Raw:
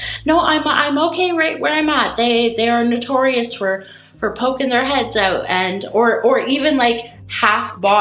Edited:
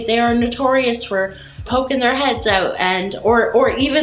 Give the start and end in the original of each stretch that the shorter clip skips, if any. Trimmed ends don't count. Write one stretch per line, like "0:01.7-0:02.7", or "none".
0:04.1-0:04.3